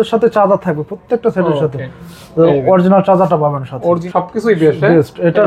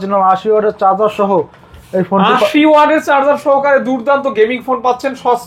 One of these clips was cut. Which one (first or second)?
first